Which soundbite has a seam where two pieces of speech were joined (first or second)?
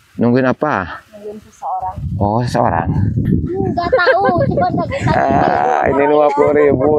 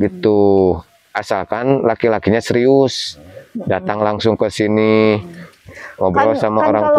first